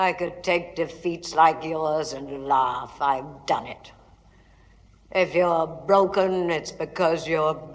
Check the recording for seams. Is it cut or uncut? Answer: uncut